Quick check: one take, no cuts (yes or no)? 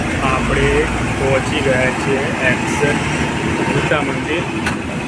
yes